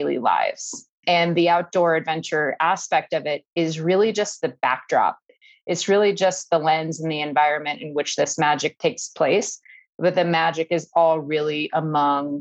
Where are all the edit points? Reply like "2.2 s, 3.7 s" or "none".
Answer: none